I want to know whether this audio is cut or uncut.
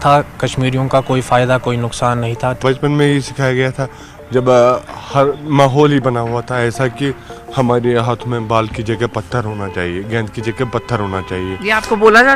cut